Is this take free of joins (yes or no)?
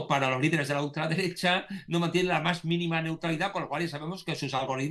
yes